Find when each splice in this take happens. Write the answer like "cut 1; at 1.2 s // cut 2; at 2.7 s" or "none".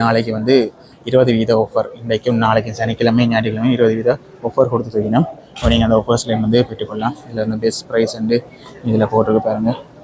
none